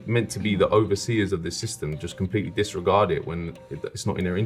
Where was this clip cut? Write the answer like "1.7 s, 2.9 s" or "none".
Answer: none